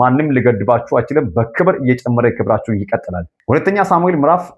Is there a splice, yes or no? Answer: yes